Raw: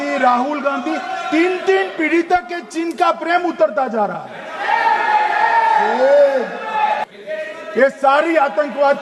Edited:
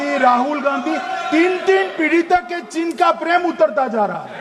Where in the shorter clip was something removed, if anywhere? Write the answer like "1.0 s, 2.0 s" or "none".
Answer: none